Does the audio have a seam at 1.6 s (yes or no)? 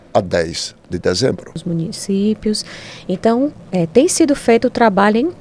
yes